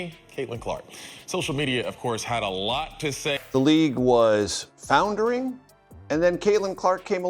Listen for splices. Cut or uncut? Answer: cut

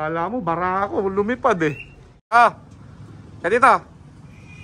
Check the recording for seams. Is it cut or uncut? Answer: cut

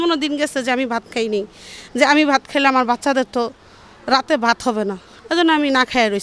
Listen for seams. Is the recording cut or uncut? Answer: uncut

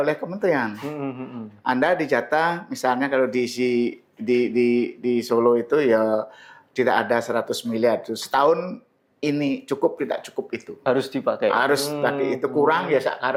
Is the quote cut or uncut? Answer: uncut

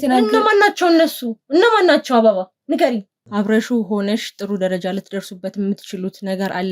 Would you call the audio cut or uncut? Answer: cut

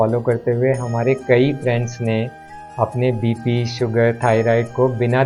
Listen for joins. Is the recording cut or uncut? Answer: uncut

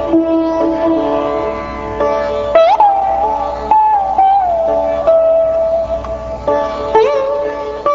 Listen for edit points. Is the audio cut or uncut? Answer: cut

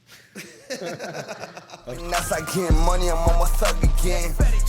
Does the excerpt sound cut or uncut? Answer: cut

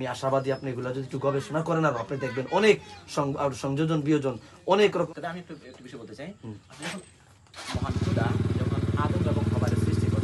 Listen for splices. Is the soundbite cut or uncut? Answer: cut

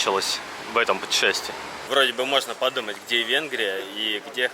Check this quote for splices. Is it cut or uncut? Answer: cut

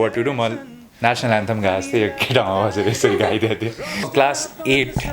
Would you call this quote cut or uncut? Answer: cut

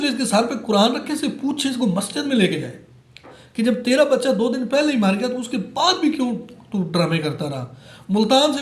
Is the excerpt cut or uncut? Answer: uncut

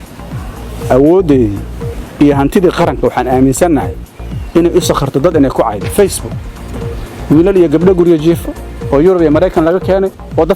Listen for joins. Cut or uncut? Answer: uncut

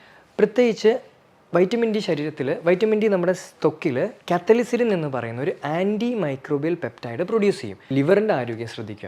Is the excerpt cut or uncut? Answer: cut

